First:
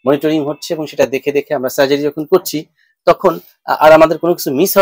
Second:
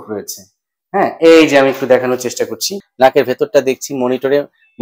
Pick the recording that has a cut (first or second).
second